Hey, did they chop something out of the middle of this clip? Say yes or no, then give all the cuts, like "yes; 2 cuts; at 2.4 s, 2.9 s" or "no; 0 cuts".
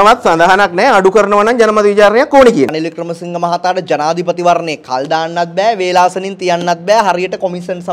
yes; 1 cut; at 2.7 s